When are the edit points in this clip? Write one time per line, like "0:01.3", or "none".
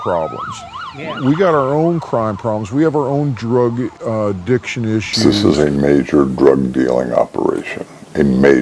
0:05.1